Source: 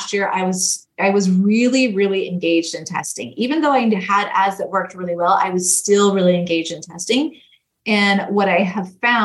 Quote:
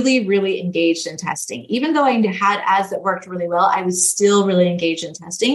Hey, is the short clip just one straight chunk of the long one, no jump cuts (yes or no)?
yes